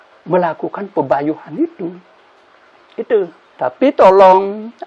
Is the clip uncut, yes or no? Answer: no